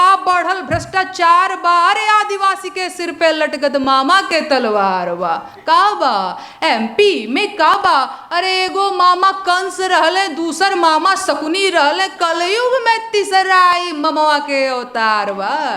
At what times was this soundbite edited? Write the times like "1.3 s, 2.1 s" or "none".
none

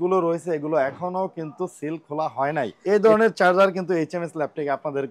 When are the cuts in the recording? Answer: 2.7 s

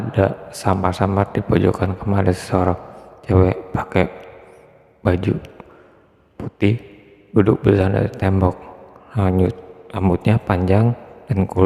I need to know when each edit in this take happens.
none

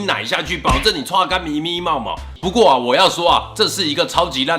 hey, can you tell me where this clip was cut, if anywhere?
2.3 s

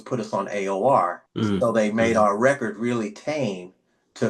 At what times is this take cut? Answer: 1.2 s

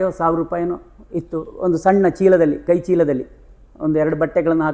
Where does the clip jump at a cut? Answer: 1.5 s

